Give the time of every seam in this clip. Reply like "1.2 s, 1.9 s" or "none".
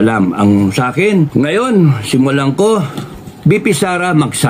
1.3 s